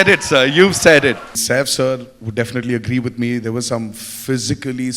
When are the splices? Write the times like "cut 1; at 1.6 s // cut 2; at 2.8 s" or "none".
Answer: cut 1; at 1.3 s